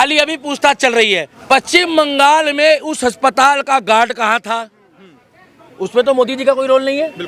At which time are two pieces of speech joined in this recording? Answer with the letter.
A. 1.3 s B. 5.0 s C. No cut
A